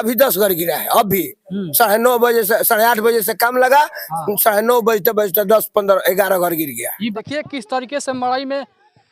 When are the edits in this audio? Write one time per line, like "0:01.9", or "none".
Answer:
0:07.0